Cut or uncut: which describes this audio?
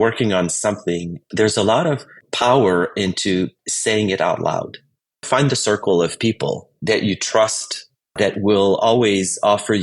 cut